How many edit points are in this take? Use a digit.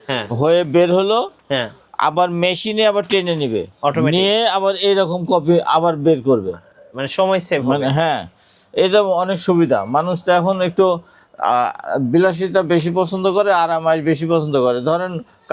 0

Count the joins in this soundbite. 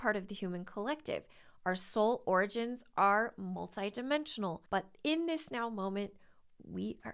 1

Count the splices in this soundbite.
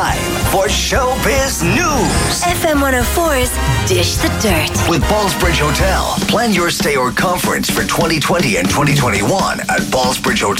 0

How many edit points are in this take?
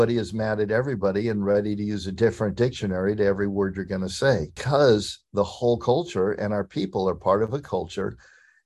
1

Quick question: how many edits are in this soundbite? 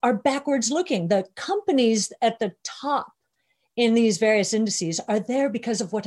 0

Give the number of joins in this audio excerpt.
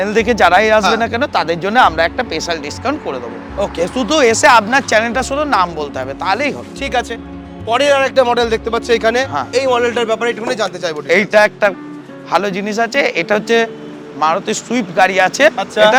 0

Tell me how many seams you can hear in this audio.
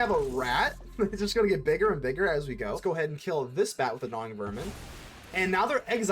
1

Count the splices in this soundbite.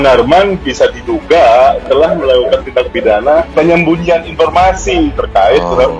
1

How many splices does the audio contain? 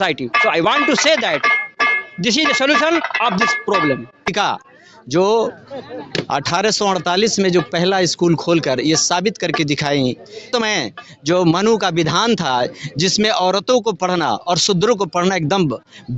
2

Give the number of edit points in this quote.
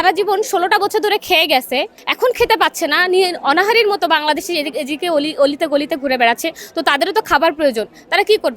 1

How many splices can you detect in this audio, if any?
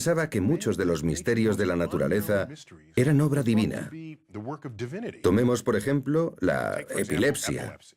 1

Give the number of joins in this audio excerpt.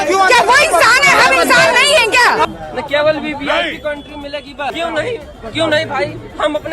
2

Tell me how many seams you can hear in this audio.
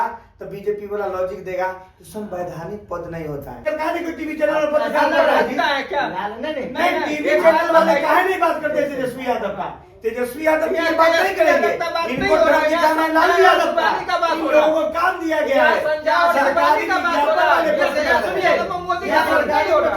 1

